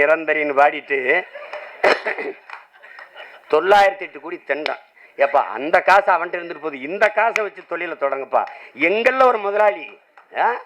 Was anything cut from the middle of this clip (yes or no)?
no